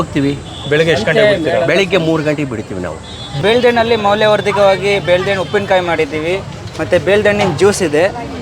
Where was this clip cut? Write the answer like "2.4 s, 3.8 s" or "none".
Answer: 3.4 s